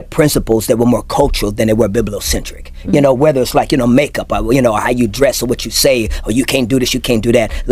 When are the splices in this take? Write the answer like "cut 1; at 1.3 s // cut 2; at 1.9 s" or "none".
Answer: none

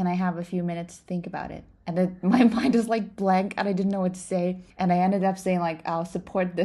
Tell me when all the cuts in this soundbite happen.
none

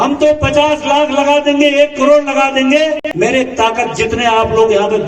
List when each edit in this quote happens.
cut 1; at 3.0 s

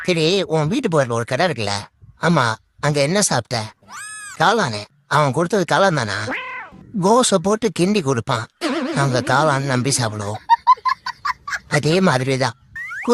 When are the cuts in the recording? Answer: none

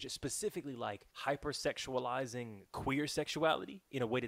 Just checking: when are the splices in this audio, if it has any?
cut 1; at 1.1 s

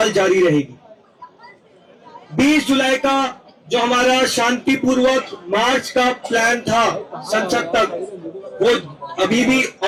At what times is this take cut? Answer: none

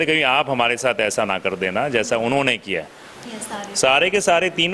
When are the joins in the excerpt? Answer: cut 1; at 3.1 s

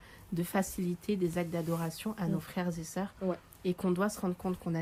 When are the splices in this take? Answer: none

